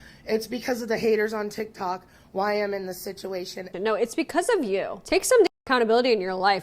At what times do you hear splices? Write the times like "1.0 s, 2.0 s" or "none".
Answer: 3.7 s